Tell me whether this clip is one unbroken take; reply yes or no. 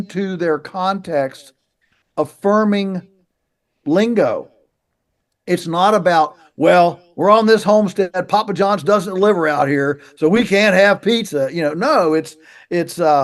yes